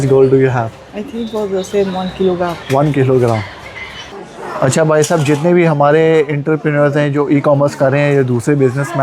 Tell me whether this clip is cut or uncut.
cut